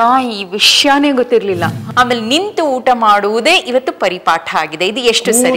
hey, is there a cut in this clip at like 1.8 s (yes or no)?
yes